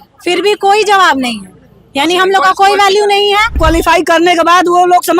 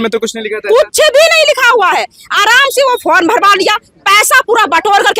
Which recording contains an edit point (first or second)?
first